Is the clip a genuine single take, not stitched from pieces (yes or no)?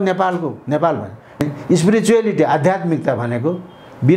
no